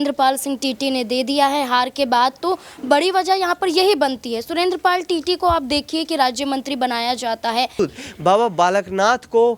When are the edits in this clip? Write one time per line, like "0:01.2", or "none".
0:07.8